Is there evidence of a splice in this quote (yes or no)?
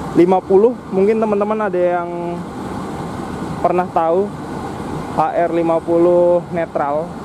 no